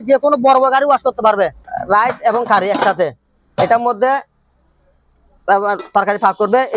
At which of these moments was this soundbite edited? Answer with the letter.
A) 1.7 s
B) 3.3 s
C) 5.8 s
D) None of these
A